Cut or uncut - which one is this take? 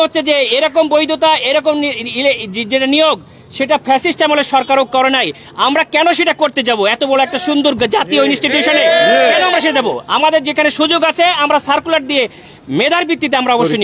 uncut